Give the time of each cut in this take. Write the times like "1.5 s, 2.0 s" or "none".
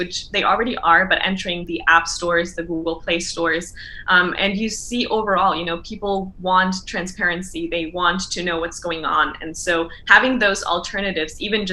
none